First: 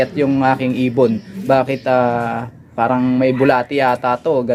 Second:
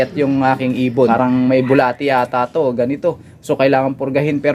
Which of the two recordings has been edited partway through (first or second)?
second